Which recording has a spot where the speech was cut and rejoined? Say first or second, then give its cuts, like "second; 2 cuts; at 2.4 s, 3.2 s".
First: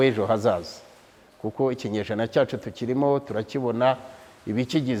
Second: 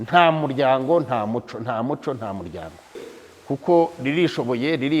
second; 1 cut; at 3.1 s